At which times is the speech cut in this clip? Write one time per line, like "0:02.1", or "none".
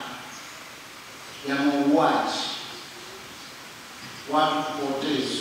none